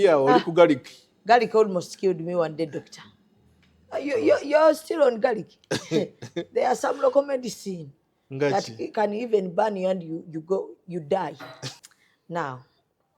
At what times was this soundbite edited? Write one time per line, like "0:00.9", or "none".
0:11.6